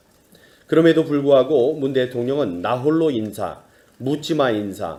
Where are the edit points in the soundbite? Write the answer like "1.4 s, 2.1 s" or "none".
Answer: none